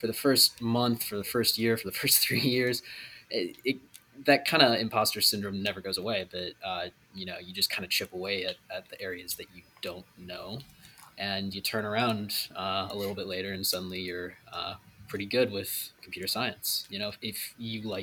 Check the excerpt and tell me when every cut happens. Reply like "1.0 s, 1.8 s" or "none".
16.8 s